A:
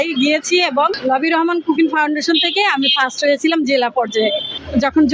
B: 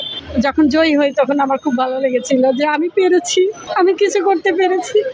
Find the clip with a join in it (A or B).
A